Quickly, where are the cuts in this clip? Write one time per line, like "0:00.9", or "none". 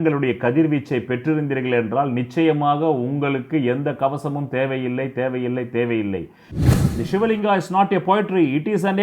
0:06.6